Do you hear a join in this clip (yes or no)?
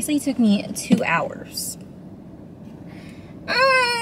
no